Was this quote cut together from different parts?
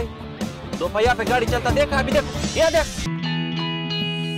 yes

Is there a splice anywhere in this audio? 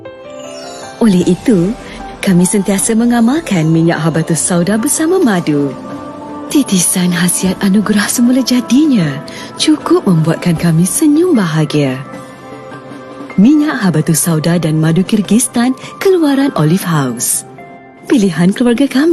no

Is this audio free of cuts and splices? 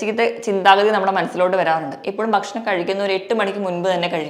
no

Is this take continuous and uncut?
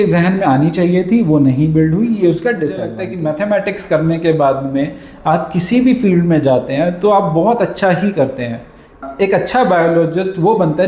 no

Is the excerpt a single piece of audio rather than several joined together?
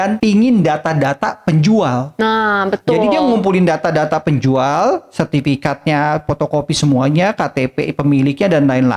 yes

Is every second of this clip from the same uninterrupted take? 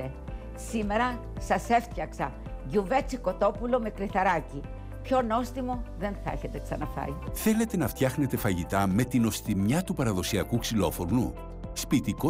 yes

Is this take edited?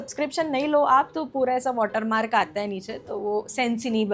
no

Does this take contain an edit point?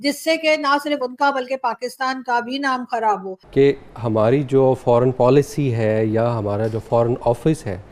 yes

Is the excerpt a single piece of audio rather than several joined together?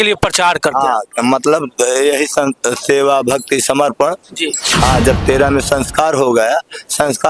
yes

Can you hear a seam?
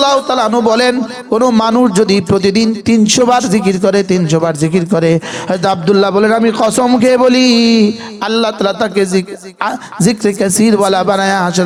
no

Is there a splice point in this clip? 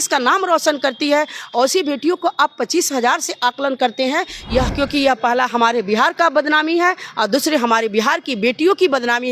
yes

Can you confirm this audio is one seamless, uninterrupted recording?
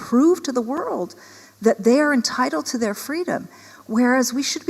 yes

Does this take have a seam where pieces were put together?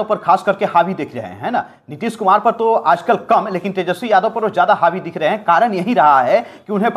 no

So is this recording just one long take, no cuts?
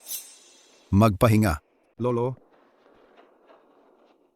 no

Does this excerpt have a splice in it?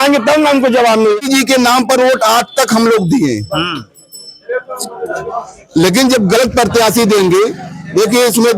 yes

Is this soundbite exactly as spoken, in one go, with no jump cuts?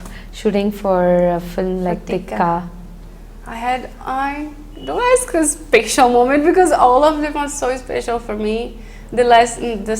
yes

